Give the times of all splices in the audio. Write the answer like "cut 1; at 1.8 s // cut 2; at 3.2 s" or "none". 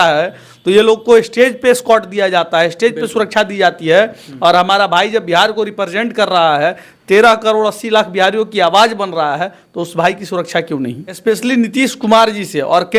cut 1; at 11.2 s